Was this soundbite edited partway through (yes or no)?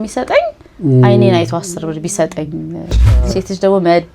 yes